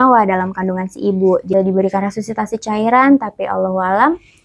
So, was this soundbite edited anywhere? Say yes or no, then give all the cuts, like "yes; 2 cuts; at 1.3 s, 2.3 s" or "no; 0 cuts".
yes; 1 cut; at 1.5 s